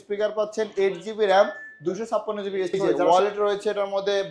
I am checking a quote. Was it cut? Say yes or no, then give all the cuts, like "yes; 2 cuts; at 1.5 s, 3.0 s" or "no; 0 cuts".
yes; 1 cut; at 2.9 s